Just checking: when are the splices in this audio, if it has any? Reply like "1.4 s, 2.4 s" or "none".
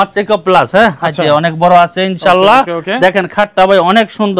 none